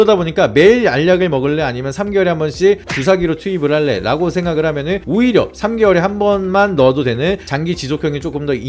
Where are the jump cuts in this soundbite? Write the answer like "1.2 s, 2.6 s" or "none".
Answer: none